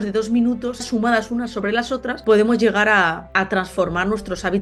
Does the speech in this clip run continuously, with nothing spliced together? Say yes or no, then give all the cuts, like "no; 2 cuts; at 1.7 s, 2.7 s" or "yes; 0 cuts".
no; 3 cuts; at 0.8 s, 2.1 s, 3.2 s